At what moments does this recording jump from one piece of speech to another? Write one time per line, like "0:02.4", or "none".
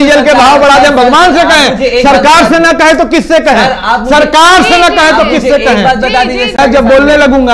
0:06.6